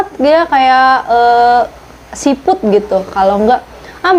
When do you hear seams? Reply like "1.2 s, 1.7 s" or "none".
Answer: none